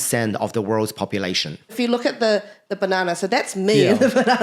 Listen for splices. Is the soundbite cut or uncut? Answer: cut